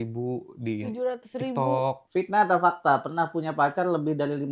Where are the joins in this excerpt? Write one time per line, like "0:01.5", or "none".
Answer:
0:02.0

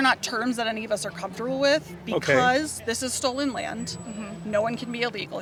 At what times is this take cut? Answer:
none

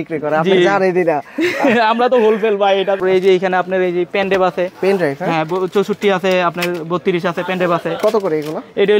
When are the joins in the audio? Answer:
0:03.0

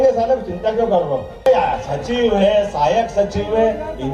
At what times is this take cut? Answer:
0:01.5

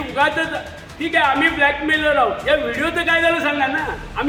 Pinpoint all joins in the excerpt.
none

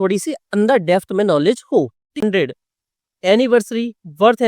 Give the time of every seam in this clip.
0:02.2

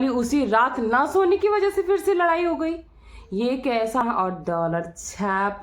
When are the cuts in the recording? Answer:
0:04.0

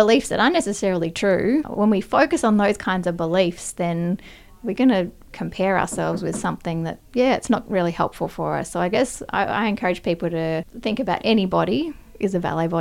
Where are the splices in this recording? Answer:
0:01.7
0:07.0
0:10.7

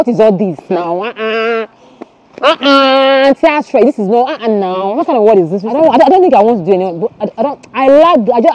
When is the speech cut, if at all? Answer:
0:05.7

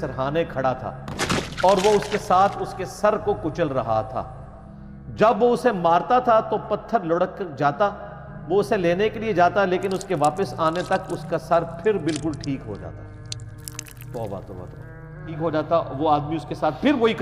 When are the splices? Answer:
0:15.3

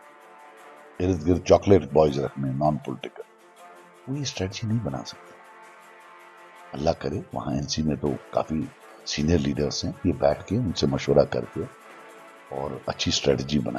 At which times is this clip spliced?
0:01.0

